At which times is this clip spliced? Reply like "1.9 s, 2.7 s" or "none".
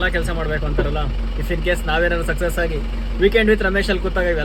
none